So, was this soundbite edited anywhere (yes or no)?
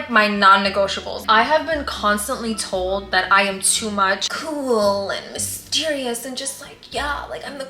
yes